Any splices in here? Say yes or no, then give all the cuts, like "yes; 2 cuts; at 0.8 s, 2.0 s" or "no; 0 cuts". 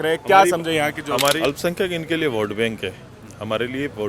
yes; 1 cut; at 1.3 s